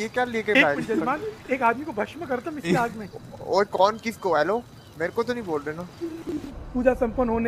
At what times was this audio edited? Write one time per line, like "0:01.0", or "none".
0:06.5